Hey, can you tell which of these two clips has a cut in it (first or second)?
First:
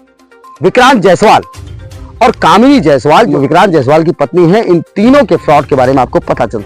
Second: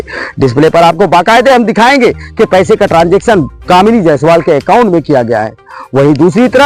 first